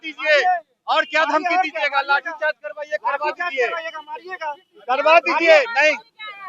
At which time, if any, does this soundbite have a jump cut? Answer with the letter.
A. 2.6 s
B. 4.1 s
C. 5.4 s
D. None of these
D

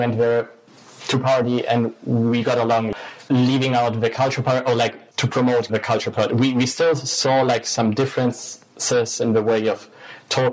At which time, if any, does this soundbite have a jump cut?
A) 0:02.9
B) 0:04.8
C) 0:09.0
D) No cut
A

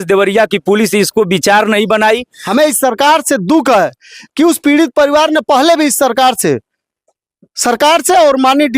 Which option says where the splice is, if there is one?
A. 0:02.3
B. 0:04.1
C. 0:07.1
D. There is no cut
A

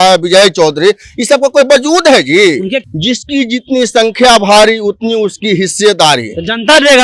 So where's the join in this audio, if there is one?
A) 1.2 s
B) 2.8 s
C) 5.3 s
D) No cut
B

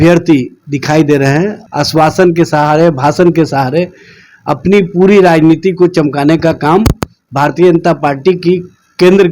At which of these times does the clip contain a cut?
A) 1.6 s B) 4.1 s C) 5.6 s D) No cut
A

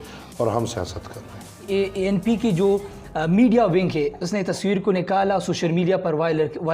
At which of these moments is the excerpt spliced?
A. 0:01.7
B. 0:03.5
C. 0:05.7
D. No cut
A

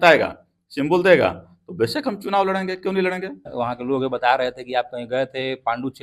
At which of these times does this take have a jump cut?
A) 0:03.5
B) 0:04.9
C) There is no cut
A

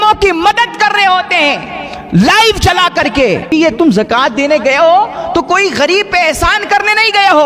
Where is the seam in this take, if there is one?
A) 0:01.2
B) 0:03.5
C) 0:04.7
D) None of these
B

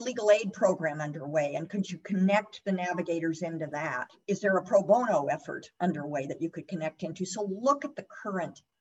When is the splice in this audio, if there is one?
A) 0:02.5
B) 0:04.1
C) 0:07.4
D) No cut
B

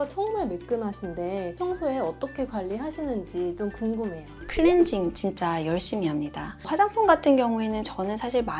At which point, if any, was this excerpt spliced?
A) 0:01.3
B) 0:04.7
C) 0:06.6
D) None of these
C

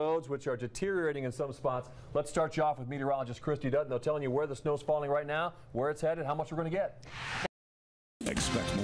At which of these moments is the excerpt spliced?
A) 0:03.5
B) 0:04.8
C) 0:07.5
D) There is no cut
C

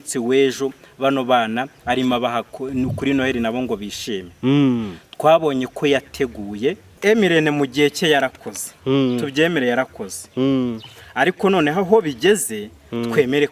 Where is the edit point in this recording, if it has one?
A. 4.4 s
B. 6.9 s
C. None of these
B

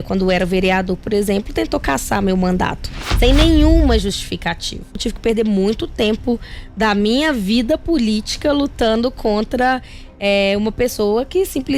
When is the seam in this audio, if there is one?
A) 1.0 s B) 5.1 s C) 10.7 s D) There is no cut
B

